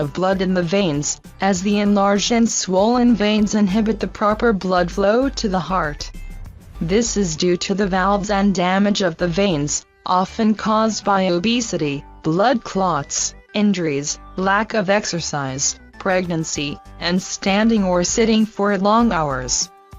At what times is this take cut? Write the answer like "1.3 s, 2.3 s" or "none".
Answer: 4.3 s